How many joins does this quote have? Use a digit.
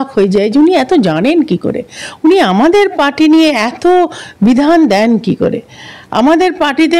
0